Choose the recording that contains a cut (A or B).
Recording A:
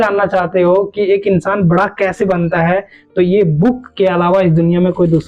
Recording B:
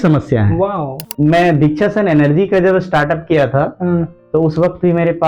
B